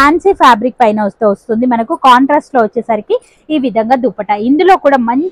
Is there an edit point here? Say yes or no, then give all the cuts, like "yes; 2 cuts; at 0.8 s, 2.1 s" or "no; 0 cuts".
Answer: no; 0 cuts